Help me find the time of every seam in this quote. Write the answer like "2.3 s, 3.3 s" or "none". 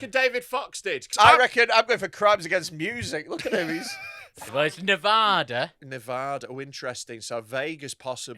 1.1 s, 4.5 s